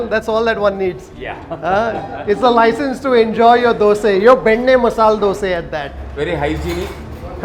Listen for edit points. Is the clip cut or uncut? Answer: uncut